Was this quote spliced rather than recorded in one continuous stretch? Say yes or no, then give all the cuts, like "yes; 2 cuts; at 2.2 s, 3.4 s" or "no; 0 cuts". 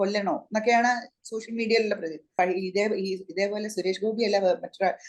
no; 0 cuts